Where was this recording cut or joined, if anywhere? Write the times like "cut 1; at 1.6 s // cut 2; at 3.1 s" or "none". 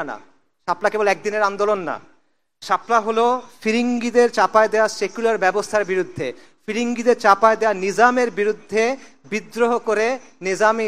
none